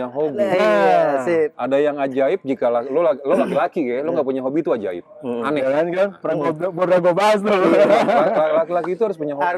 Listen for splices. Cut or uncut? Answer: uncut